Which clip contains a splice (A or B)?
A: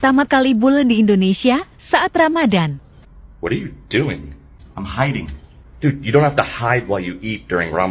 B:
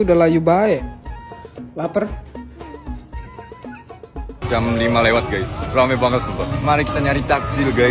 B